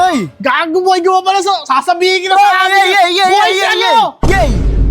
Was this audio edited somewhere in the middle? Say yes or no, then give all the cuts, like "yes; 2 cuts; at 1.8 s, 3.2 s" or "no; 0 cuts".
no; 0 cuts